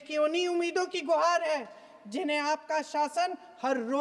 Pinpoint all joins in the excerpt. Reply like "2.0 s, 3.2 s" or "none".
none